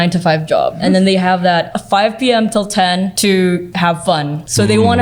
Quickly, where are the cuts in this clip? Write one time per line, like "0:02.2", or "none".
0:00.8
0:01.8
0:03.1
0:04.0

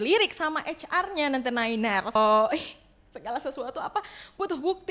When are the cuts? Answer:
0:02.2

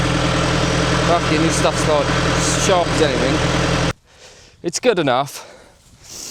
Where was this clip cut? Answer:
0:03.9

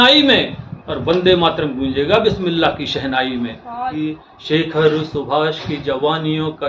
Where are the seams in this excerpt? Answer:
0:03.9

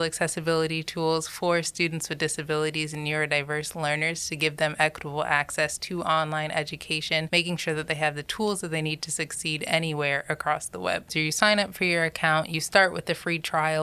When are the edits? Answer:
0:07.3
0:08.3
0:11.1

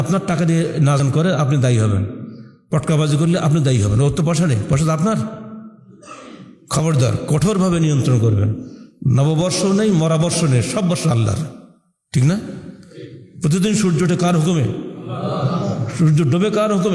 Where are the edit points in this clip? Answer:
0:01.0

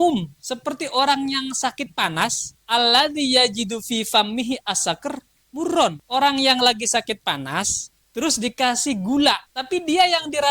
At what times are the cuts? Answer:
0:02.5
0:06.0
0:09.5

